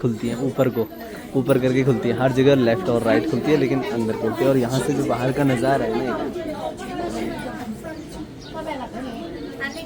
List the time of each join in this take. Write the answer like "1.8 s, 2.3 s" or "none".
none